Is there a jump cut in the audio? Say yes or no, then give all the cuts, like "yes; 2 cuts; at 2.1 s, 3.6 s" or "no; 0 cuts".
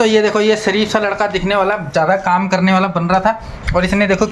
no; 0 cuts